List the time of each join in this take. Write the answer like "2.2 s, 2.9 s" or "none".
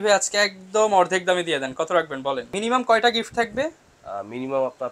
2.5 s

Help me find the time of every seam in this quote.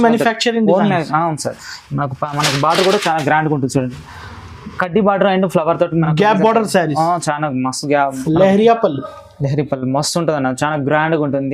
8.2 s

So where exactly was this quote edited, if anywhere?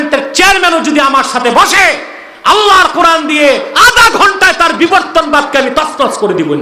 none

